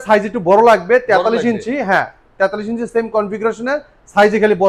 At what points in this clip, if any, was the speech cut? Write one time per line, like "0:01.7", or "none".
none